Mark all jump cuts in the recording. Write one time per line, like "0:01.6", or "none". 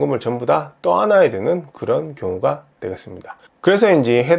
none